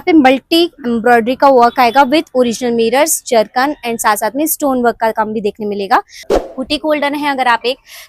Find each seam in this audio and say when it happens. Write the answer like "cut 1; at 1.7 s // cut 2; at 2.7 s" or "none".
cut 1; at 6.2 s